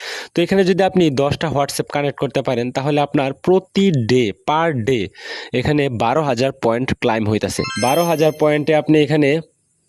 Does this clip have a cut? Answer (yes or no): yes